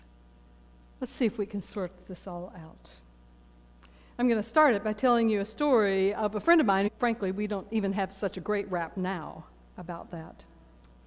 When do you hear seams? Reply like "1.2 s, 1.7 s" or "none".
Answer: none